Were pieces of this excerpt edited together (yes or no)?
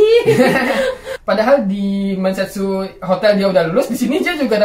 yes